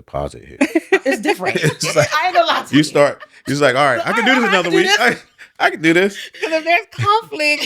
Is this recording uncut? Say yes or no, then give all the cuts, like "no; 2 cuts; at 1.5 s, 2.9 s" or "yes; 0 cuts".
no; 1 cut; at 6.3 s